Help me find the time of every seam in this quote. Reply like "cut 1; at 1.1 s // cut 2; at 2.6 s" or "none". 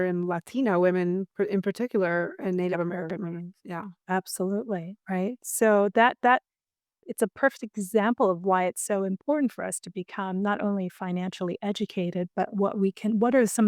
cut 1; at 7.0 s